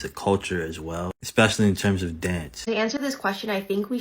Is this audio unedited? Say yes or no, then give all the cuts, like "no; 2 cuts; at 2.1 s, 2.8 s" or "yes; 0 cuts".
no; 1 cut; at 2.5 s